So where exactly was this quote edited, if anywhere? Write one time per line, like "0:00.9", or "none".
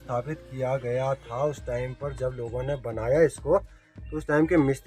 none